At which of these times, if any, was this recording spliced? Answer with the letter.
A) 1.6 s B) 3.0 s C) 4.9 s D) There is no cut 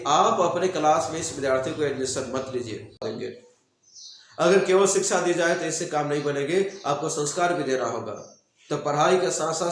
B